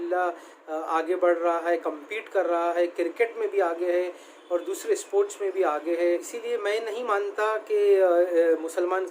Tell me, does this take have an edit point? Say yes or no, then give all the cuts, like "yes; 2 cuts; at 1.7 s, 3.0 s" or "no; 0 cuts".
yes; 1 cut; at 6.1 s